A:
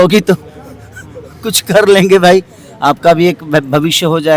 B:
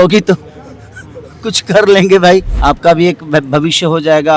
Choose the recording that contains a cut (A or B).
B